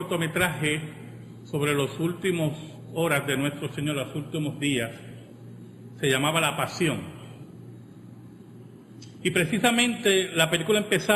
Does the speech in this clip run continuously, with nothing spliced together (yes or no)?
no